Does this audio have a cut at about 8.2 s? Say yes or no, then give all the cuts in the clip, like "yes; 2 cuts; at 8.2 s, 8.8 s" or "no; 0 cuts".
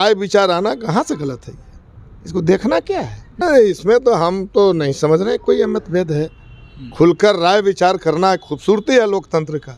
no; 1 cut; at 3.4 s